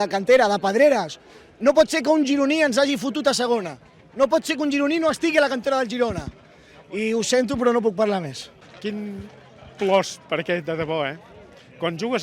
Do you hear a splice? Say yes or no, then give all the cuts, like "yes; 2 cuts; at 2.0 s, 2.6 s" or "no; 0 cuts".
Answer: yes; 1 cut; at 8.6 s